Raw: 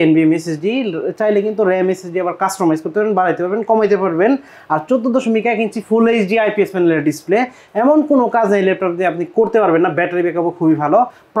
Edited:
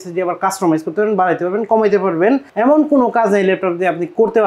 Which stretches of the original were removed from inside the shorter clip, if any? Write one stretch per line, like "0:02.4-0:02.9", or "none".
0:04.5-0:07.7